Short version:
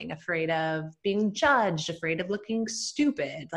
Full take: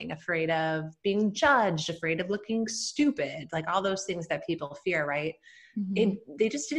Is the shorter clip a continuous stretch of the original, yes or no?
yes